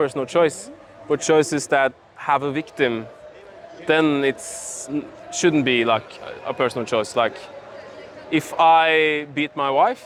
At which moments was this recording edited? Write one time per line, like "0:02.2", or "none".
none